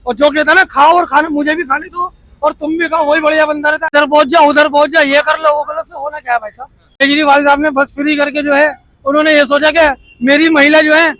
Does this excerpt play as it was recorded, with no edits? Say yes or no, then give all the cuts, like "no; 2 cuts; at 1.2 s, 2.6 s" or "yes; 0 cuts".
no; 2 cuts; at 3.9 s, 7.0 s